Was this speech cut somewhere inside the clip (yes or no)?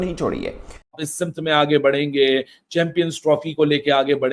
yes